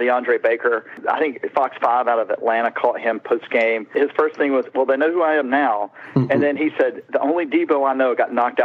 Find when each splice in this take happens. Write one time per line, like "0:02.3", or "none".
0:00.9
0:03.9